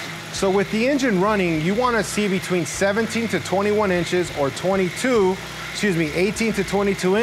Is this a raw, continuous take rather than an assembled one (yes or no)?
yes